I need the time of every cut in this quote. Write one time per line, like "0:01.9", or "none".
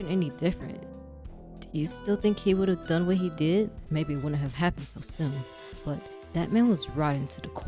0:03.8

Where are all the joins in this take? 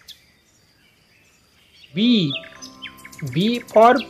0:01.9

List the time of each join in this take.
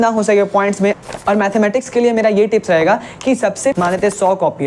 0:01.0
0:03.7

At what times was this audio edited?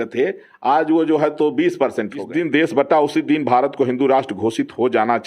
0:02.2

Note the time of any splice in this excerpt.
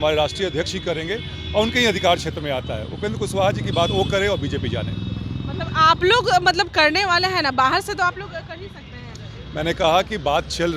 none

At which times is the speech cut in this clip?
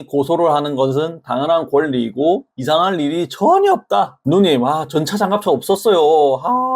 0:04.1

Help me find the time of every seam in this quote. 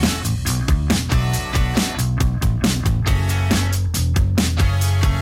0:02.0

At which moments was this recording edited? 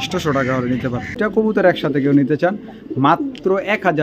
0:01.2

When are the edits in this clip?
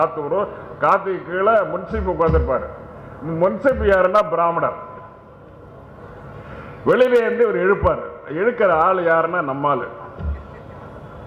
none

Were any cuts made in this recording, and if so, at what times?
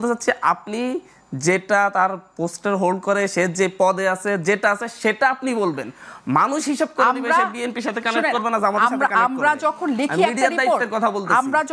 none

